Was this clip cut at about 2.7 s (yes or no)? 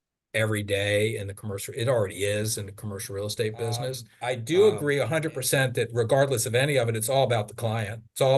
no